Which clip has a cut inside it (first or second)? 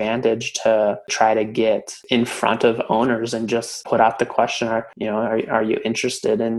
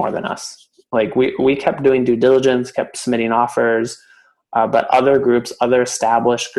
first